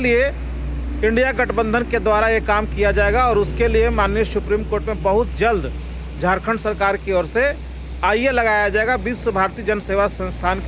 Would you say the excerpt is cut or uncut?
uncut